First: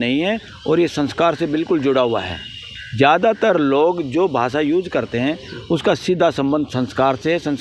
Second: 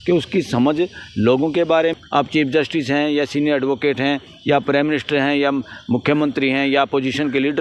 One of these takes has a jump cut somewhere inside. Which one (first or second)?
second